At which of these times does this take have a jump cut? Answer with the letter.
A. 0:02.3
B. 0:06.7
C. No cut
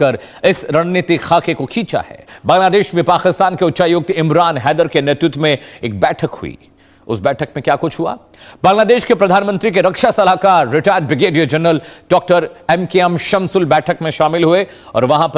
A